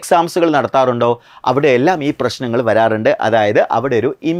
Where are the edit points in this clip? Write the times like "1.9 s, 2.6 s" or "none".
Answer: none